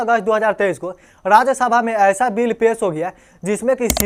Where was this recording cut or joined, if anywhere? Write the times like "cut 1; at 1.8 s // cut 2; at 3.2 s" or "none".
none